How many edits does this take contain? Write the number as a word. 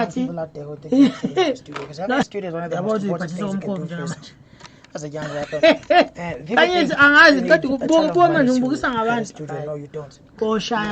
one